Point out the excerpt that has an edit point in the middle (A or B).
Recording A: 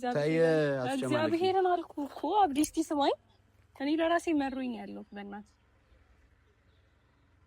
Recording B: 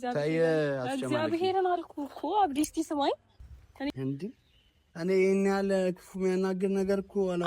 B